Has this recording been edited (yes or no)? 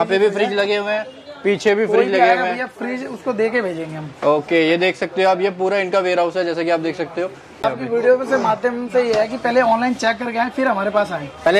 yes